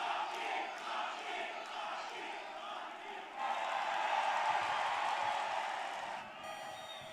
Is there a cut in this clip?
yes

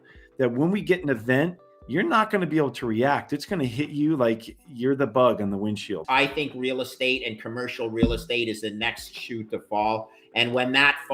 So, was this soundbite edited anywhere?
yes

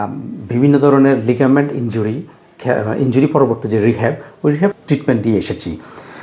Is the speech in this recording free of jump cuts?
no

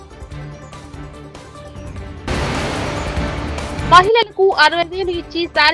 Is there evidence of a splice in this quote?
no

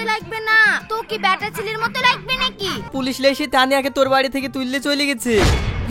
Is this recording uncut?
no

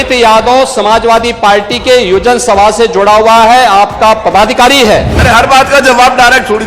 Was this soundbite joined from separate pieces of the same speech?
yes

